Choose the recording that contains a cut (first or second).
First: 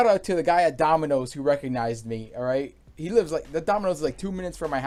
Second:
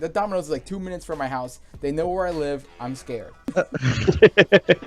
second